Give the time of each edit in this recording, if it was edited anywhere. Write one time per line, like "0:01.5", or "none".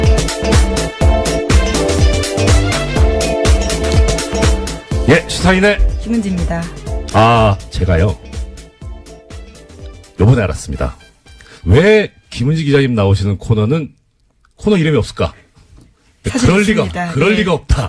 none